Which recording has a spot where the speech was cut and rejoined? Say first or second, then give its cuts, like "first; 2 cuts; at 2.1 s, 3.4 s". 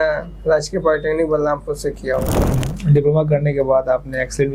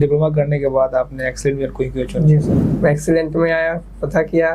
second; 1 cut; at 2.6 s